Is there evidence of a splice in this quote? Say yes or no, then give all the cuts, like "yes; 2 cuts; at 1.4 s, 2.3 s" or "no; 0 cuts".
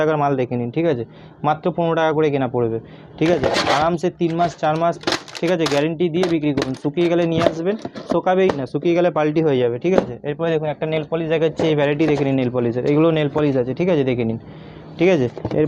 no; 0 cuts